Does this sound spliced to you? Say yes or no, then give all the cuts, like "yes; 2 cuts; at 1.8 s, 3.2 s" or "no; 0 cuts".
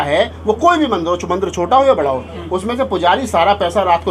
no; 0 cuts